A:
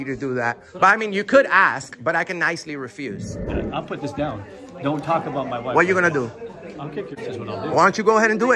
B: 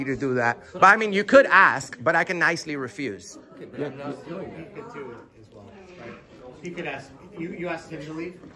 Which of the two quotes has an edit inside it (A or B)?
A